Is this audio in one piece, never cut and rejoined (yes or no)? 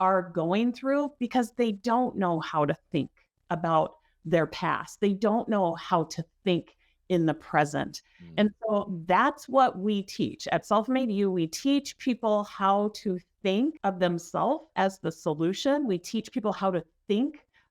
no